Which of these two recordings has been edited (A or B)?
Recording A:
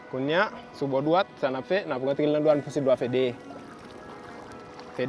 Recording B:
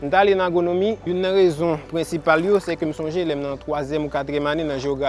B